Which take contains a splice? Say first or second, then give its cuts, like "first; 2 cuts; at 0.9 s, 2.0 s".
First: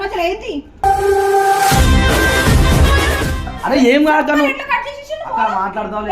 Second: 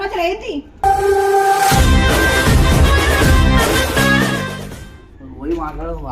first; 1 cut; at 3.5 s